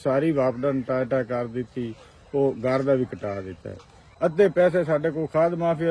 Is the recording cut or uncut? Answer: cut